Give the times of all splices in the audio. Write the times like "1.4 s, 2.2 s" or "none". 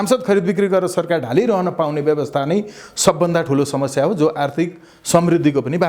none